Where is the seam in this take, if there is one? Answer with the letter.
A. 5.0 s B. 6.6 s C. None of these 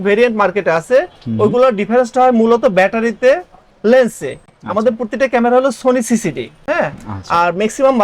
C